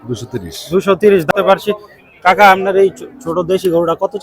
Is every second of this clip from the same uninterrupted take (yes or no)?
no